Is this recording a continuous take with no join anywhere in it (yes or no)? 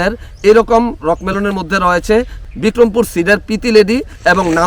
yes